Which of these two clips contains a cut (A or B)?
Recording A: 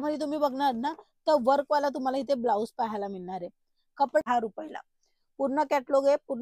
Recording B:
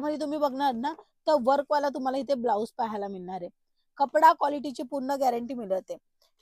A